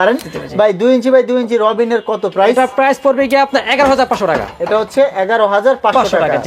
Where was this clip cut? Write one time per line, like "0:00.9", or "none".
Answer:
none